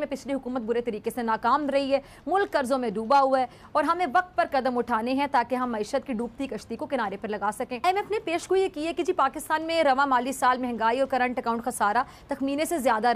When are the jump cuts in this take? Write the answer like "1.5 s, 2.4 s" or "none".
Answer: 7.8 s